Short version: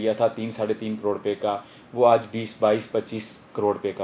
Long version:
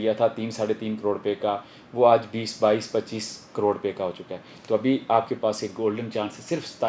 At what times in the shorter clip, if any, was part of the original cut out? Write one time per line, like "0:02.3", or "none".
none